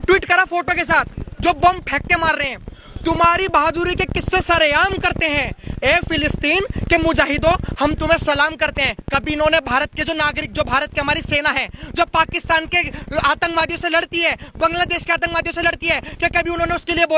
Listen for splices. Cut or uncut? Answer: uncut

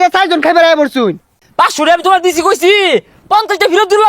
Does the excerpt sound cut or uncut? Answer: cut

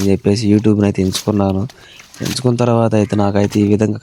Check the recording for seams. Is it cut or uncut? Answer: uncut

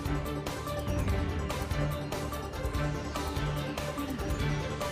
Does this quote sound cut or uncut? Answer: cut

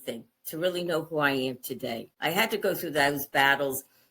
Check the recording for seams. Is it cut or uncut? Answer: cut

